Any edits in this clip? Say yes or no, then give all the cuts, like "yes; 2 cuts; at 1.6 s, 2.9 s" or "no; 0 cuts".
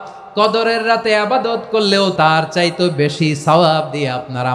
yes; 1 cut; at 2.1 s